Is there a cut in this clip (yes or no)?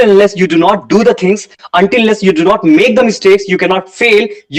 no